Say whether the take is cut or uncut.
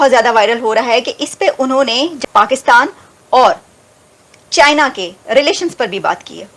cut